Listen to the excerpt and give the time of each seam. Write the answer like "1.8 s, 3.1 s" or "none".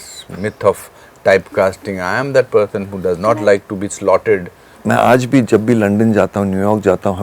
4.7 s